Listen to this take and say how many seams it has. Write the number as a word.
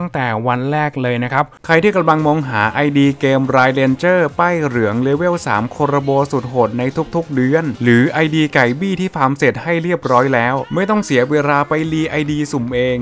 one